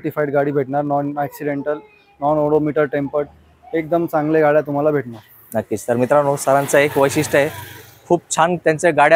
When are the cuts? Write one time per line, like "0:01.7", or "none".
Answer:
none